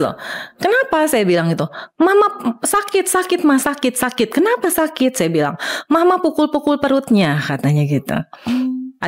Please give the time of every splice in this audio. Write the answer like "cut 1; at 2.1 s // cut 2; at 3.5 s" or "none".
none